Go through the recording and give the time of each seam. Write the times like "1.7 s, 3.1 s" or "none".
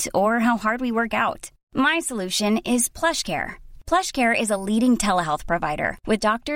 none

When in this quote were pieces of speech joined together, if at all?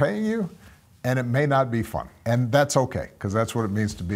2.1 s

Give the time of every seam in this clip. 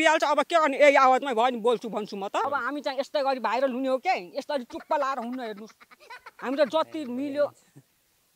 2.4 s

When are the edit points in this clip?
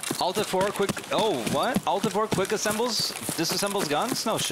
none

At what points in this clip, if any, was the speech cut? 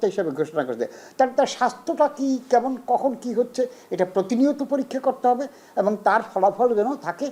none

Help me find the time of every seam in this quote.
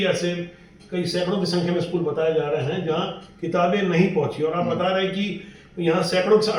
none

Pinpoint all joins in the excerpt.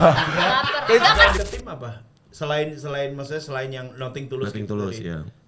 1.4 s

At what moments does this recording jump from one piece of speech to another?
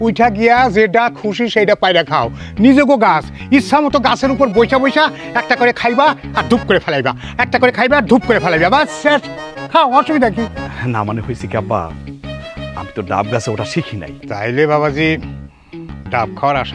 14.1 s

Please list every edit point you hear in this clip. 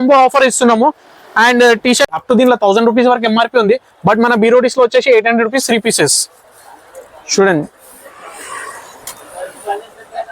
2.1 s

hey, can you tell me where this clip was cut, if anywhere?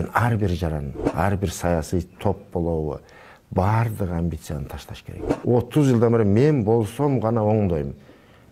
5.3 s

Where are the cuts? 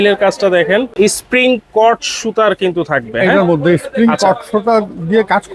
0.9 s

